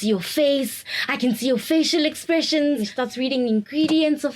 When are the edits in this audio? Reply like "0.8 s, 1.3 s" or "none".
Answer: 2.9 s